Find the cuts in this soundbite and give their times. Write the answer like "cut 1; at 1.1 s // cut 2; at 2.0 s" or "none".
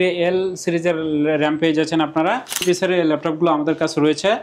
cut 1; at 2.6 s